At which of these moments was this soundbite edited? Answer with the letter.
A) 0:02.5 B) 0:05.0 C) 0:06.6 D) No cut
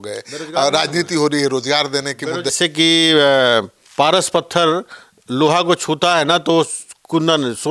A